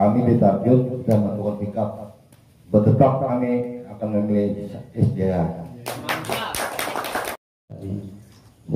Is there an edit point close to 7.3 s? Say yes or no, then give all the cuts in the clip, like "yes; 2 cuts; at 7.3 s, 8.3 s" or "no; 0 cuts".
yes; 1 cut; at 7.3 s